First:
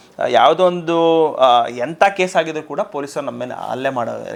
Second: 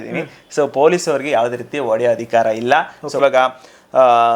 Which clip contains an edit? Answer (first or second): second